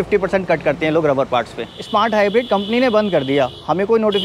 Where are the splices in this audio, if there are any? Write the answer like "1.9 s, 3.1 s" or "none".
1.6 s